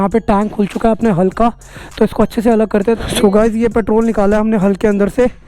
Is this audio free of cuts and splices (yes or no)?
no